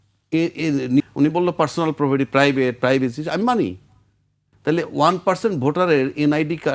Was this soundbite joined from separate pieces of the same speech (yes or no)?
yes